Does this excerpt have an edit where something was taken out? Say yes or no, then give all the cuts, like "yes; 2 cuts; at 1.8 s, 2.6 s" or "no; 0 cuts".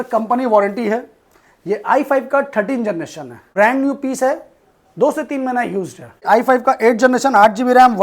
yes; 2 cuts; at 3.5 s, 6.2 s